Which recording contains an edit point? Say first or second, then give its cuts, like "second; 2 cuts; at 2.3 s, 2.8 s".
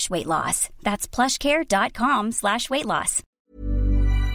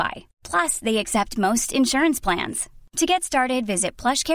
first; 1 cut; at 3.4 s